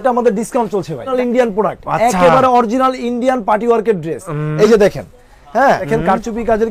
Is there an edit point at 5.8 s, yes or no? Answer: yes